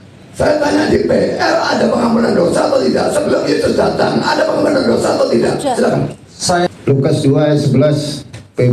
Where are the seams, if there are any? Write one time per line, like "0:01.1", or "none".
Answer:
0:06.7